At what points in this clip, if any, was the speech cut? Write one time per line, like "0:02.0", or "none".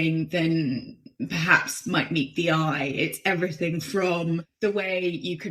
0:04.5